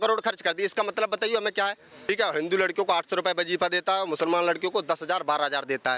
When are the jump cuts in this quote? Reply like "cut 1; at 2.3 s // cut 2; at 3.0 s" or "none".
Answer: cut 1; at 1.9 s

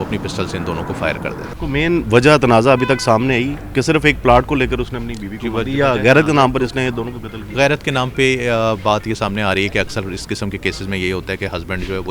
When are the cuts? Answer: cut 1; at 1.5 s

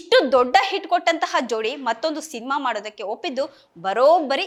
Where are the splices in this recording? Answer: none

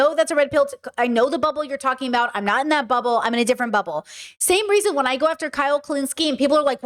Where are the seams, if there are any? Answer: none

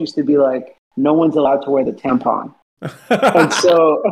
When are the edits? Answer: none

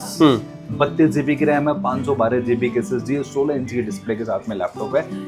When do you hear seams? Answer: none

